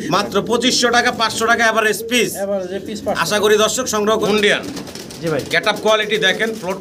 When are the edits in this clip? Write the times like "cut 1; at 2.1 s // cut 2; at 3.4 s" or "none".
cut 1; at 4.2 s